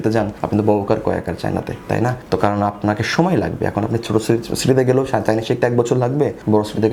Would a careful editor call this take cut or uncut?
uncut